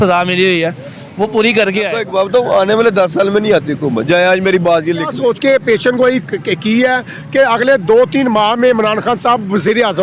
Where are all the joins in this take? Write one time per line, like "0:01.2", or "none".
0:02.0
0:05.1